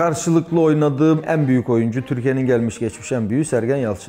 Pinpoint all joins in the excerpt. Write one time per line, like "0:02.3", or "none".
0:01.2

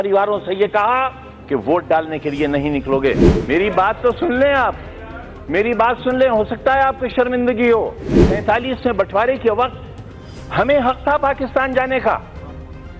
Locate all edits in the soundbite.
0:03.3
0:08.3

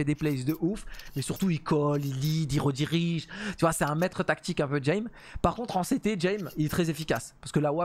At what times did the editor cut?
none

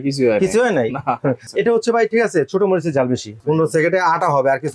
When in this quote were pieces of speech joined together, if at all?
0:01.5
0:03.3

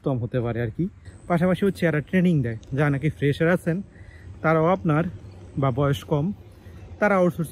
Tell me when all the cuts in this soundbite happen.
0:01.1

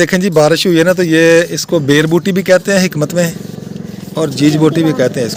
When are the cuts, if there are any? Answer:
none

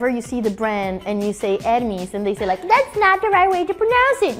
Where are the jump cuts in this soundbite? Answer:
none

